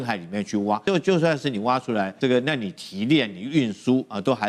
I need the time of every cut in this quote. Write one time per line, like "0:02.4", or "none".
0:00.8
0:02.1